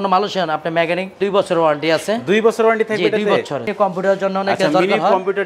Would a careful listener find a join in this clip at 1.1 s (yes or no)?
yes